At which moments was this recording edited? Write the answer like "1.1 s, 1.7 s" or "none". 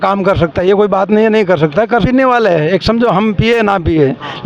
2.0 s